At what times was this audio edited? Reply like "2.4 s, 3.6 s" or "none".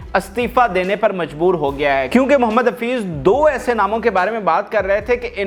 none